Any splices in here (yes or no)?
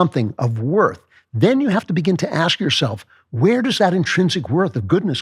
no